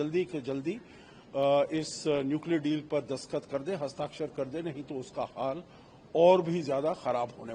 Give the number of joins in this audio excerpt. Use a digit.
0